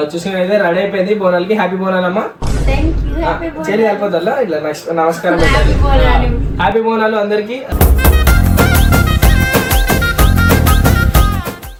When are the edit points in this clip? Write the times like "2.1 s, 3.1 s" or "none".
none